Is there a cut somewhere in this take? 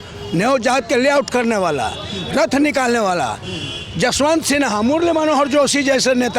no; 0 cuts

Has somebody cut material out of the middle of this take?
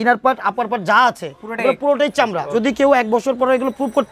yes; 1 cut; at 2.5 s

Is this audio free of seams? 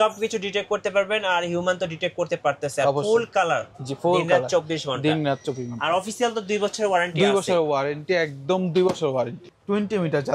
no; 1 cut; at 9.4 s

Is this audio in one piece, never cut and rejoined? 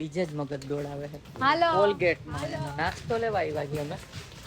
no; 1 cut; at 1.2 s

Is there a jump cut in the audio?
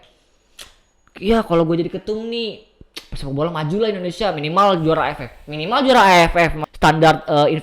yes; 1 cut; at 6.6 s

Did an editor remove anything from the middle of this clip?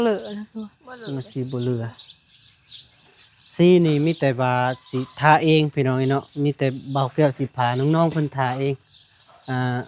no; 0 cuts

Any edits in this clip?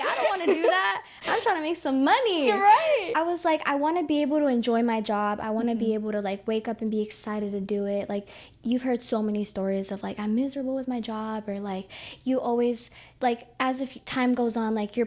no; 0 cuts

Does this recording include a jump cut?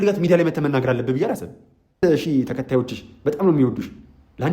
yes; 1 cut; at 2.0 s

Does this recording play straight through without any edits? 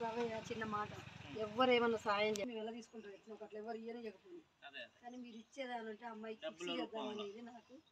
yes; 0 cuts

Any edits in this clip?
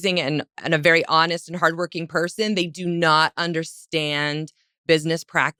no; 0 cuts

